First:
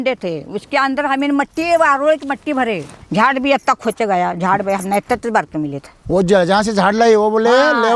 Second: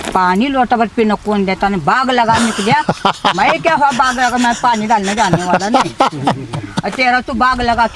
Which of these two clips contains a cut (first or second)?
first